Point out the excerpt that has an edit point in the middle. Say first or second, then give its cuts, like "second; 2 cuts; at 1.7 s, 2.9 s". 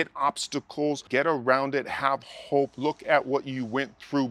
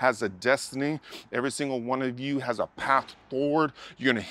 first; 1 cut; at 1.0 s